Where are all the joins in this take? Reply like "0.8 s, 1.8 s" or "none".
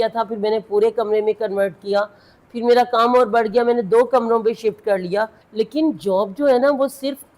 5.4 s